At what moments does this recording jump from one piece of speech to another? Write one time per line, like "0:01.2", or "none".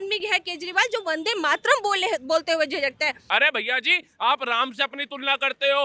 0:03.2